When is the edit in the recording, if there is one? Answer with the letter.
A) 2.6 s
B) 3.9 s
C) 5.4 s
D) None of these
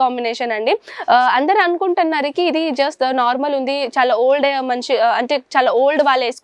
D